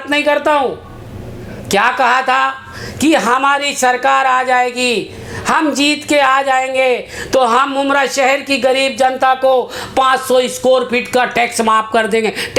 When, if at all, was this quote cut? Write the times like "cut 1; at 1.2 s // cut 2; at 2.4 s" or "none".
none